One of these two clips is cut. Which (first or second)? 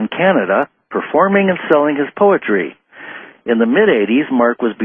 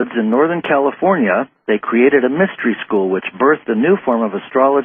second